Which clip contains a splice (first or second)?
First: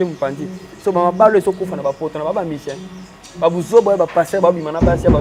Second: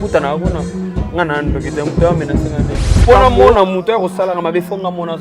second